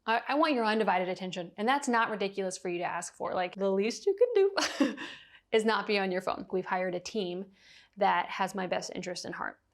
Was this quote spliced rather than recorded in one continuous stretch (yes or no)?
yes